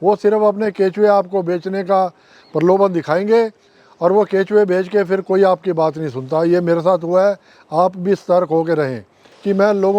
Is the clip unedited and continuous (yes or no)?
yes